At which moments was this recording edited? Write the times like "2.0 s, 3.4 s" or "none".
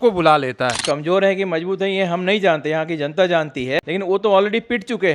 0.8 s, 3.8 s